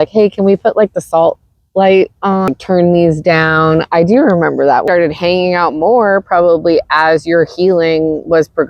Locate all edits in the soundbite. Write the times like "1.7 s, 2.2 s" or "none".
2.5 s, 4.8 s